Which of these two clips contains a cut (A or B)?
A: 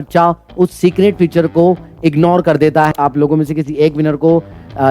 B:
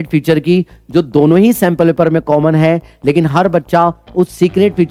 A